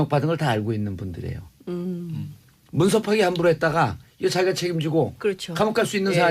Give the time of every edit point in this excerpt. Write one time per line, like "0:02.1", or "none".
0:03.8